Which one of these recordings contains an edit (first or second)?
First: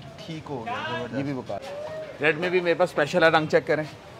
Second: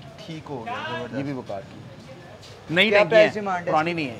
first